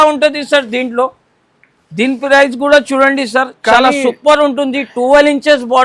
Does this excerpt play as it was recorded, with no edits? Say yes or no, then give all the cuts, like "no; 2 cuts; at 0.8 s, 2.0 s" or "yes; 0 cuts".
yes; 0 cuts